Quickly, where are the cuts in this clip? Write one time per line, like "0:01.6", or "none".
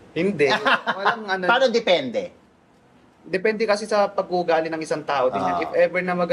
none